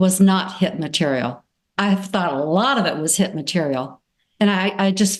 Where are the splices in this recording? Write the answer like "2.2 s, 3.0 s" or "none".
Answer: none

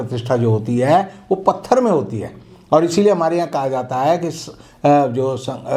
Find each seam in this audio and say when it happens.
none

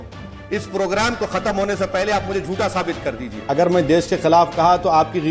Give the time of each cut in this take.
3.4 s

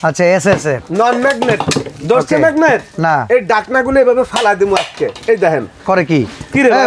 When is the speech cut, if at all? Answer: none

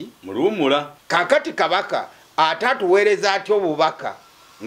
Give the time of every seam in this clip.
1.0 s

